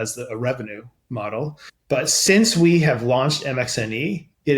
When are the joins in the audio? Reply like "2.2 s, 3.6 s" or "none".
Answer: 1.7 s

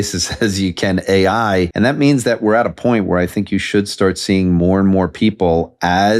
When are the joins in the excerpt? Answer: 1.7 s

